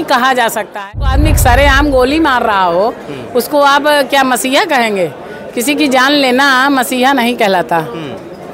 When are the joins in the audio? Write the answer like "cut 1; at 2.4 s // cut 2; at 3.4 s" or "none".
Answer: cut 1; at 1.1 s